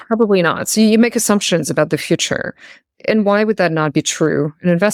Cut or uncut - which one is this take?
uncut